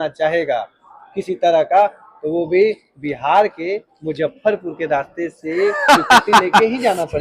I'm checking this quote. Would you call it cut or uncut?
uncut